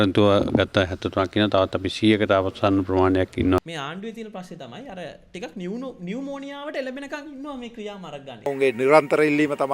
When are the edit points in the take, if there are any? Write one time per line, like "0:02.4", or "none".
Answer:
0:03.6
0:08.5